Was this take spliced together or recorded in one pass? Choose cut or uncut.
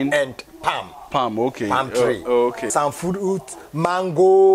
cut